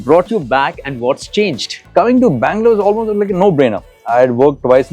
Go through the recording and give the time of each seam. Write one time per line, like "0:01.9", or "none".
0:01.9